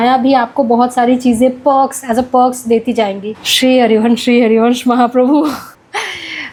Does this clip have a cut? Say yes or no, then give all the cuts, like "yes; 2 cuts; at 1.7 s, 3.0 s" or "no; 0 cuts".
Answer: no; 0 cuts